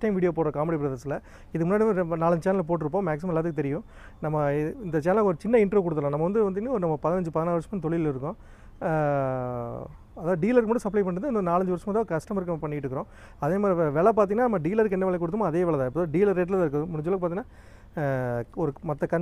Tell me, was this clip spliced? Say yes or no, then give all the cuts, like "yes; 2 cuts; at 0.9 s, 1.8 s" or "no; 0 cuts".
no; 0 cuts